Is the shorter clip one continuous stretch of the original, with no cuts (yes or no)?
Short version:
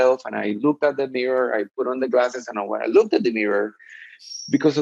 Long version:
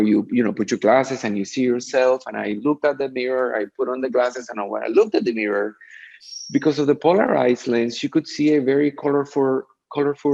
yes